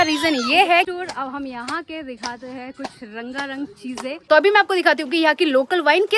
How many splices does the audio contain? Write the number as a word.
two